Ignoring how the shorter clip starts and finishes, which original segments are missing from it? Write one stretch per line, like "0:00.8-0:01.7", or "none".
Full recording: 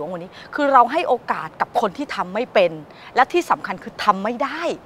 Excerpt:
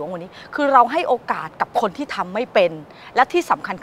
none